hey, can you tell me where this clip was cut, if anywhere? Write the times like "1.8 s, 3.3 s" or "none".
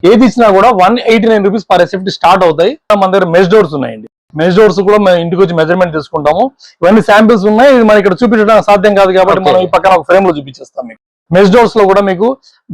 2.9 s